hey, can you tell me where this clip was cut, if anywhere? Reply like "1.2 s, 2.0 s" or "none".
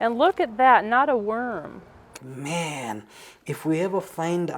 2.2 s